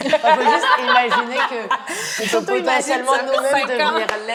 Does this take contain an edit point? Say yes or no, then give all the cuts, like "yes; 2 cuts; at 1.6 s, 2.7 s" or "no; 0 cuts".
no; 0 cuts